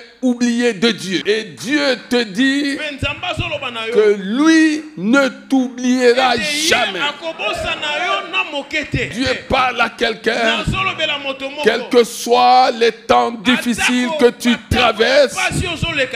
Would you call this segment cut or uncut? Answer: cut